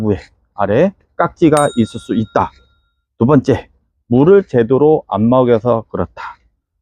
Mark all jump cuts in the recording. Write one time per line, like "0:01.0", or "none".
none